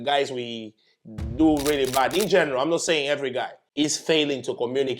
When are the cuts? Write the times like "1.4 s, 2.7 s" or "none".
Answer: 3.6 s